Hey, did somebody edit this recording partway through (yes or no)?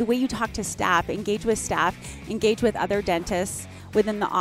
no